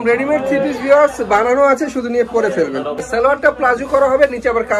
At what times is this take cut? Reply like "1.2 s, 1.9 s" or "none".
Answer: 3.0 s